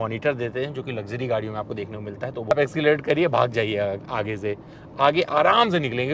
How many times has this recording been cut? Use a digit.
1